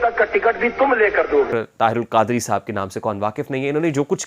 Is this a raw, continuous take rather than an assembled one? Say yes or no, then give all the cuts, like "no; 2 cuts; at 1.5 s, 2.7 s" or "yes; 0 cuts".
no; 1 cut; at 1.5 s